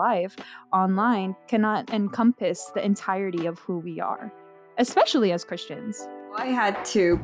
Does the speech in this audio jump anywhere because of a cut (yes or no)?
yes